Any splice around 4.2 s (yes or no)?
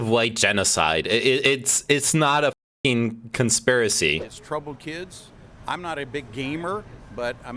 yes